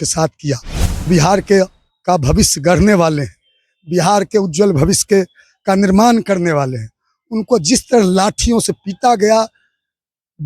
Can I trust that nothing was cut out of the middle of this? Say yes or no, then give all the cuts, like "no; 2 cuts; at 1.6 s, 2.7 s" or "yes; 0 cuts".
no; 1 cut; at 1.1 s